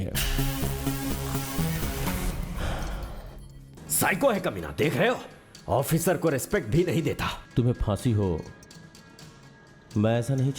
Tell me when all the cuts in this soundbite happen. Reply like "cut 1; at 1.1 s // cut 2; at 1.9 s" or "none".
cut 1; at 3.8 s // cut 2; at 7.4 s